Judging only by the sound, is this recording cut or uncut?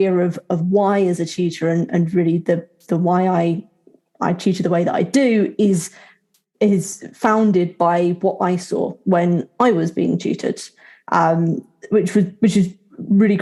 uncut